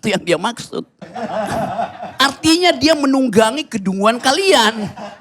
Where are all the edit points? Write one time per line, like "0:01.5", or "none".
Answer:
0:01.0